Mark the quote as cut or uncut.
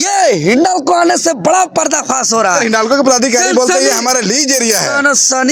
uncut